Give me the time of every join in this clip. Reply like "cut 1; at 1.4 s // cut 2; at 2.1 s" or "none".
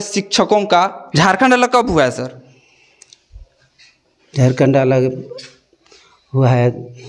cut 1; at 1.0 s